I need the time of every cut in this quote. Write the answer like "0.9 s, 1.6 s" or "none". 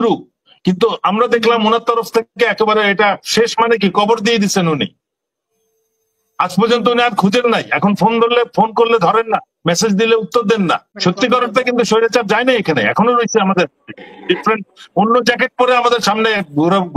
10.9 s